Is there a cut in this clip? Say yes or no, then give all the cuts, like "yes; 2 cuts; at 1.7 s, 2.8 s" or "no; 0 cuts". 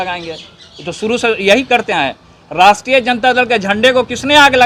no; 0 cuts